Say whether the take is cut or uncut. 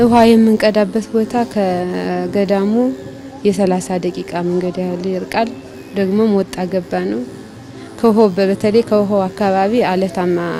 uncut